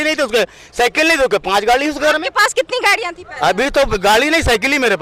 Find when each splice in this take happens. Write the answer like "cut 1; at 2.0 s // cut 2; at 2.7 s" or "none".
none

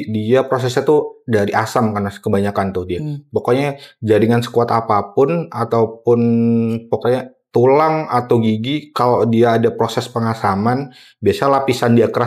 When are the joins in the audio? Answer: none

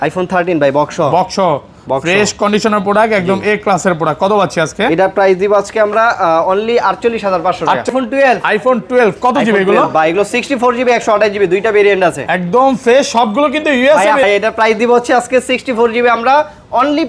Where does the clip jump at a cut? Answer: cut 1; at 7.9 s // cut 2; at 14.2 s

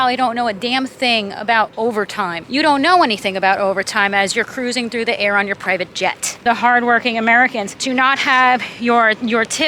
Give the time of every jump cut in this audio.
cut 1; at 2.0 s // cut 2; at 6.4 s // cut 3; at 7.7 s

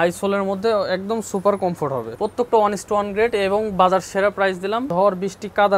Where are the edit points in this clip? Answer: cut 1; at 2.1 s // cut 2; at 4.9 s

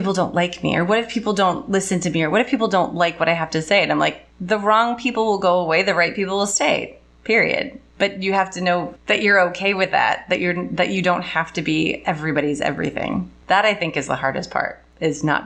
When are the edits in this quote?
cut 1; at 4.3 s // cut 2; at 7.8 s // cut 3; at 8.9 s // cut 4; at 13.3 s

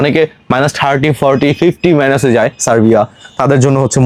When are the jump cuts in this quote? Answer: none

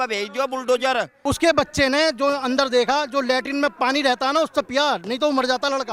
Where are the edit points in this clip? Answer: cut 1; at 1.1 s

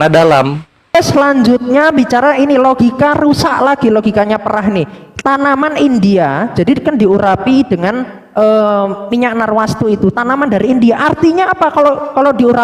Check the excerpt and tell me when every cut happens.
cut 1; at 0.9 s

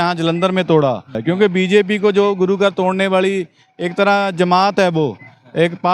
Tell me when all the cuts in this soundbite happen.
cut 1; at 1.2 s

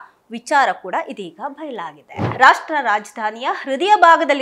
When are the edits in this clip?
cut 1; at 2.2 s

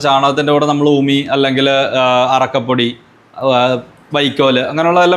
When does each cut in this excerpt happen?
none

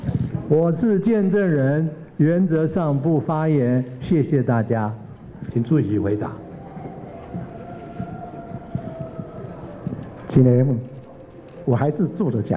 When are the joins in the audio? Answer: cut 1; at 5.4 s

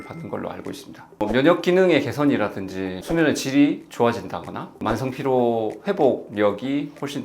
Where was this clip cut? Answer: cut 1; at 1.2 s

